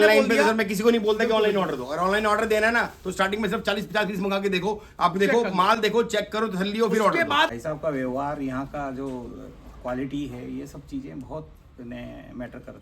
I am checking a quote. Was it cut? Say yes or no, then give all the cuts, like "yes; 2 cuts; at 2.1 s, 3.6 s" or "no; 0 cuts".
yes; 1 cut; at 7.5 s